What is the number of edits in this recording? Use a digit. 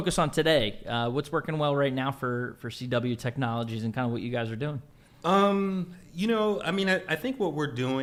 0